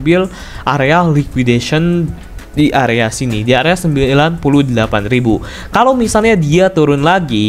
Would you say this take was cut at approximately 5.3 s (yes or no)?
no